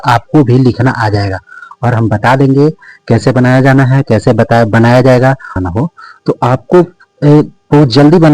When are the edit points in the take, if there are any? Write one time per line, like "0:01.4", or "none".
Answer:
0:05.6